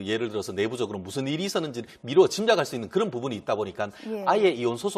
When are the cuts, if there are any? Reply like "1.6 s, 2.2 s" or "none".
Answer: 1.2 s